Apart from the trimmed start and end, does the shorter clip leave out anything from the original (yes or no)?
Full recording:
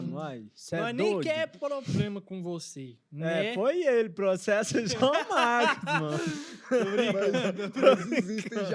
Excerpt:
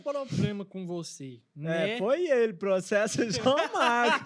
no